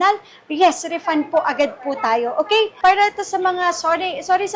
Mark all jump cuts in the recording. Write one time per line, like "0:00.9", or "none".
0:02.7